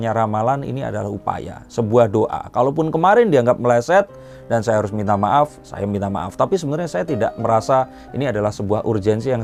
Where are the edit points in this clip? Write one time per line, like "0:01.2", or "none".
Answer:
none